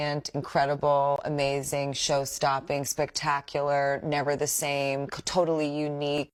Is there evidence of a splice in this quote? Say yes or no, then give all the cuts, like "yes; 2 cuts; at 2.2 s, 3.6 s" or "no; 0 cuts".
no; 0 cuts